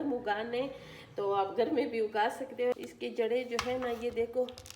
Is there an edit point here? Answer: yes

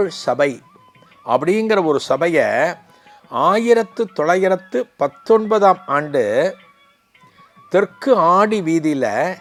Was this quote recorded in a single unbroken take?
yes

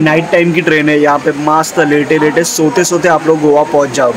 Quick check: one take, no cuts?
yes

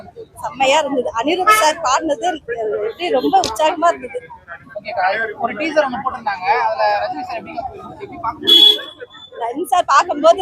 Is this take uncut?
yes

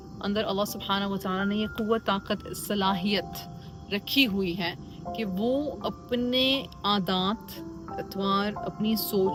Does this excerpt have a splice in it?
no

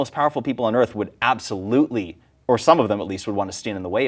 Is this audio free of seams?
yes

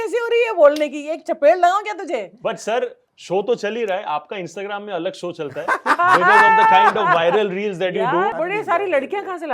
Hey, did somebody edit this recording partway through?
yes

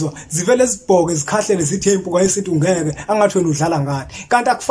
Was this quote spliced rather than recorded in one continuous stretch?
no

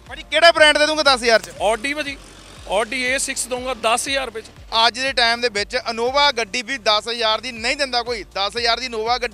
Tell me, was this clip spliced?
yes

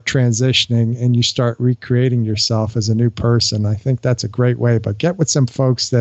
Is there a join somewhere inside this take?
no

